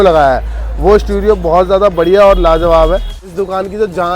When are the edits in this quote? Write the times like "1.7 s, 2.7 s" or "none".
3.2 s

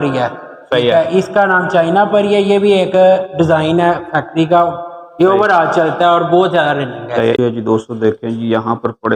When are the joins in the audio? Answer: 7.4 s

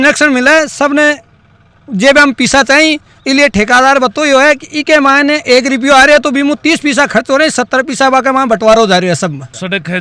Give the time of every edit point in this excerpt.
none

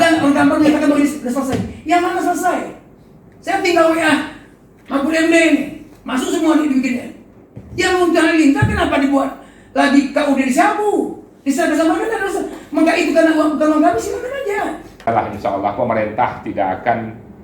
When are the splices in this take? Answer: 14.9 s

